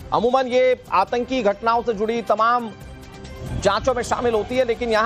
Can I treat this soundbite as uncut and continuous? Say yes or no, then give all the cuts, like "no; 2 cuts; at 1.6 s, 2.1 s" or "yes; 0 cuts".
yes; 0 cuts